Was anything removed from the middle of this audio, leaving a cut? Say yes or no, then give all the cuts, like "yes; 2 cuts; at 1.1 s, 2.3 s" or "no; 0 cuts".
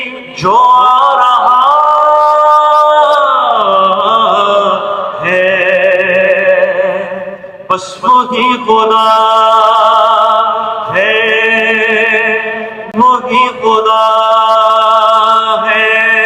no; 0 cuts